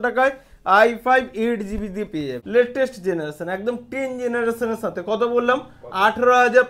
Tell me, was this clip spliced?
yes; 1 cut; at 2.4 s

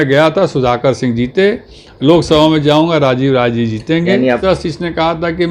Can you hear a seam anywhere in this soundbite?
yes; 1 cut; at 4.4 s

